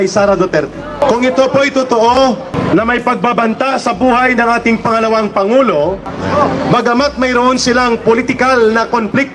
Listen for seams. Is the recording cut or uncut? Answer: cut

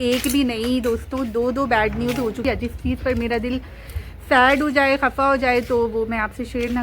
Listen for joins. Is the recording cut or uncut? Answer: cut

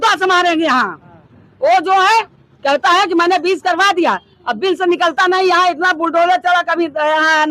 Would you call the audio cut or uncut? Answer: uncut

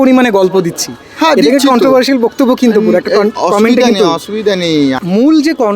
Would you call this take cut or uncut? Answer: cut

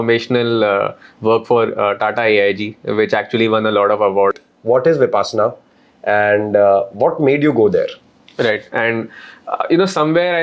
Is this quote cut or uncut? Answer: cut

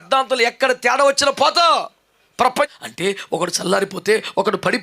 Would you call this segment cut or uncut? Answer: cut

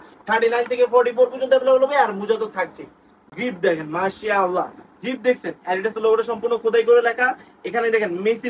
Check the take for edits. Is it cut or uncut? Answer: uncut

